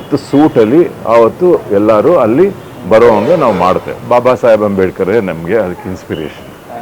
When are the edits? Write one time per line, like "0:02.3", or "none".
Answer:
0:03.9